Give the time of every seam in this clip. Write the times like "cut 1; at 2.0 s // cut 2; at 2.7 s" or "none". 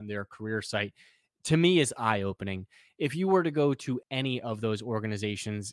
cut 1; at 4.0 s